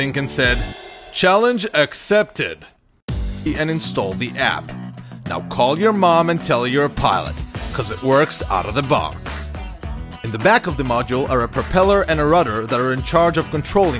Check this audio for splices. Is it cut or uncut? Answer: uncut